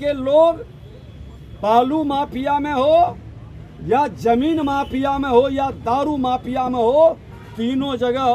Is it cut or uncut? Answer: uncut